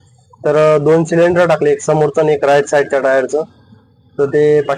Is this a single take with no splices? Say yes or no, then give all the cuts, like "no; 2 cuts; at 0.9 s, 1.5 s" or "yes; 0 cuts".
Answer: yes; 0 cuts